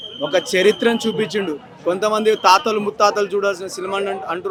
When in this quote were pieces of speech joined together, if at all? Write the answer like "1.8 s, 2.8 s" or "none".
none